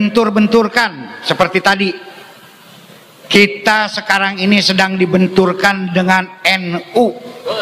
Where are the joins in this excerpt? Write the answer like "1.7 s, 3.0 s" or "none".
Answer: none